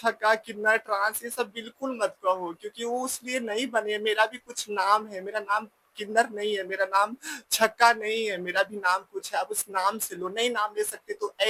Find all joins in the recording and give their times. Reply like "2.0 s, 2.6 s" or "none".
none